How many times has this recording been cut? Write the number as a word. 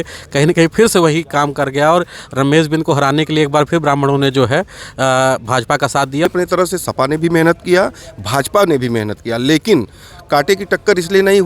one